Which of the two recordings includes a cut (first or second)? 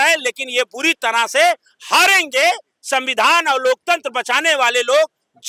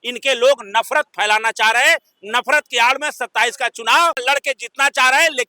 second